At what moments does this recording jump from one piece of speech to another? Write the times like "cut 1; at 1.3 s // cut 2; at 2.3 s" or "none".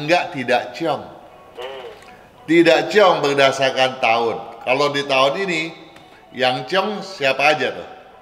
none